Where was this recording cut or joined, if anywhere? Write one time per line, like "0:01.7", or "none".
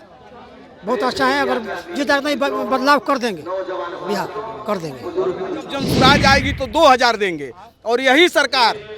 0:05.8